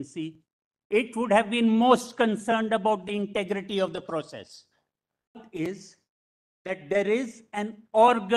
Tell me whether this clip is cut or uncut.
cut